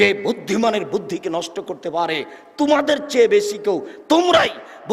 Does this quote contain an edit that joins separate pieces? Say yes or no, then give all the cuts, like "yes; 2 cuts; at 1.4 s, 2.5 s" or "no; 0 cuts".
no; 0 cuts